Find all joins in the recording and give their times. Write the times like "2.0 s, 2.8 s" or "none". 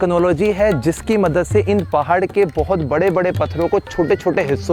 none